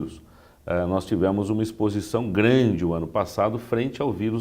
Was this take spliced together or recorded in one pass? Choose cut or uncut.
cut